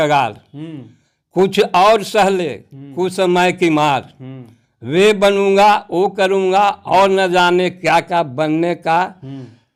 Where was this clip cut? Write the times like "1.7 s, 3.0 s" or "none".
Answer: none